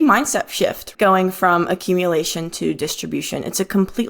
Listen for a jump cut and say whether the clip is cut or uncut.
cut